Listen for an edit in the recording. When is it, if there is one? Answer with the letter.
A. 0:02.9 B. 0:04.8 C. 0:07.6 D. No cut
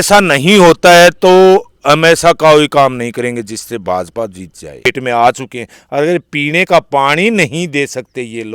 B